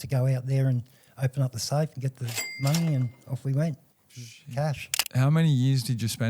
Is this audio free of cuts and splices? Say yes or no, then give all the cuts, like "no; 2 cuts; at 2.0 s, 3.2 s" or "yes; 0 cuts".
no; 1 cut; at 5.0 s